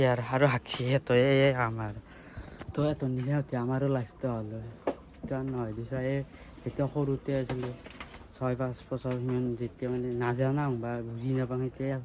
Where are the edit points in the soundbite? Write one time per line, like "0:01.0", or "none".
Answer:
none